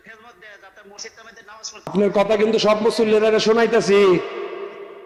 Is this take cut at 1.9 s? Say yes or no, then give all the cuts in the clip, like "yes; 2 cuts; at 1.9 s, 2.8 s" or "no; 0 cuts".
no; 0 cuts